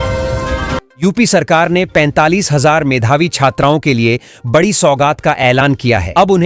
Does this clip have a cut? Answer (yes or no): yes